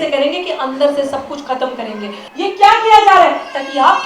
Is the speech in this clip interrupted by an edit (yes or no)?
yes